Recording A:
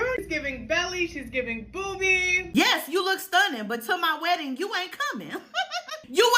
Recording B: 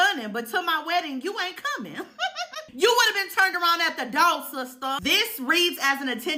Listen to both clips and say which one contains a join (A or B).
A